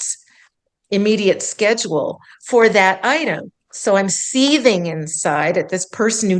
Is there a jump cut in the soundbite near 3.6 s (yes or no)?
yes